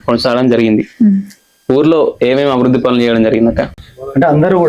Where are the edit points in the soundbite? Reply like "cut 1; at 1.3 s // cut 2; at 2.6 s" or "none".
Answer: none